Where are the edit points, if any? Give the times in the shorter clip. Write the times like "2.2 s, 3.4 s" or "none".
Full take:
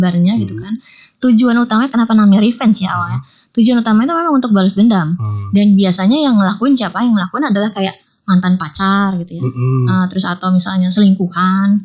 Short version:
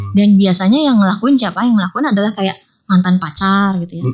none